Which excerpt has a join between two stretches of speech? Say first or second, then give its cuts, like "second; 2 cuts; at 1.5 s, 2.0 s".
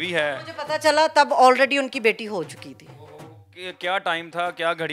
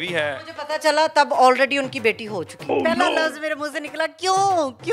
second; 1 cut; at 2.6 s